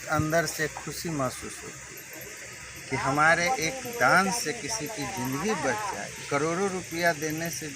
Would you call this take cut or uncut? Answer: uncut